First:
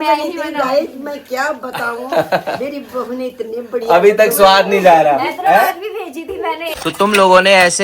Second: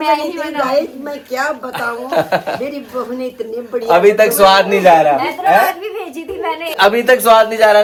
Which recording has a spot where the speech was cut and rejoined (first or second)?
first